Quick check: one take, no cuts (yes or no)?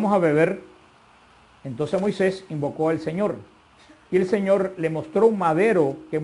no